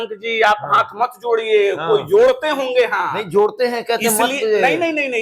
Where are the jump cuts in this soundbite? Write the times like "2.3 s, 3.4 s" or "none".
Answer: none